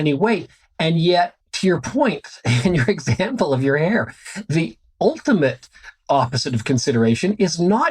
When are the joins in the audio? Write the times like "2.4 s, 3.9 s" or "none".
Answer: 1.4 s

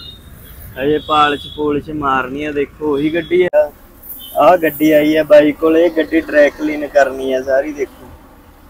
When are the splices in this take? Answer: 3.5 s

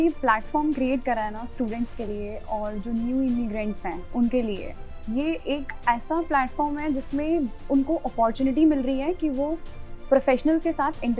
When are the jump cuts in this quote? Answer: none

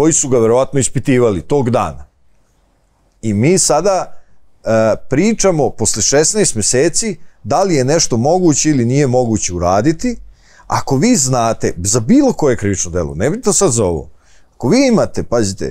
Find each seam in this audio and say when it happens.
none

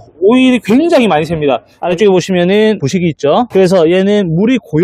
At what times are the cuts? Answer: 1.8 s, 3.3 s

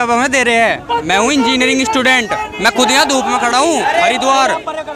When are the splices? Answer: none

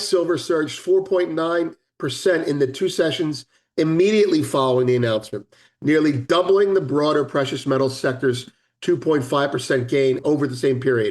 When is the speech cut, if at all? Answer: 10.2 s

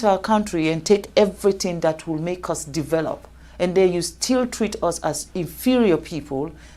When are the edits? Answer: none

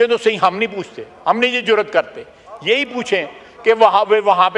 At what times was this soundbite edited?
none

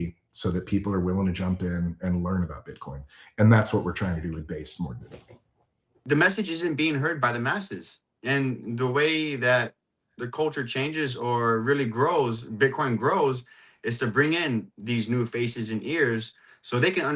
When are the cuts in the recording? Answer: 6.0 s

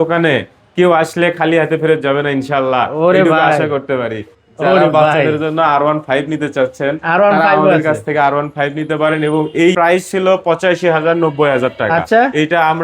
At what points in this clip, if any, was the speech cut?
4.4 s, 9.7 s

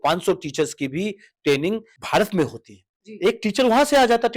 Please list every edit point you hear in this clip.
1.9 s

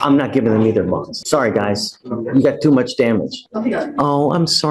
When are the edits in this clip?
1.2 s, 3.4 s

